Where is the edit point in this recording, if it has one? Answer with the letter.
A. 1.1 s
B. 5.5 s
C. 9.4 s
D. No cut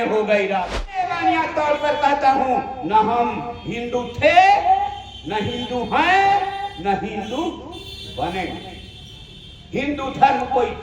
A